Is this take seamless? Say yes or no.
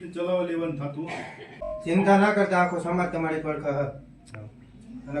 no